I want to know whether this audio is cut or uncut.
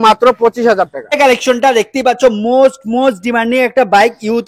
cut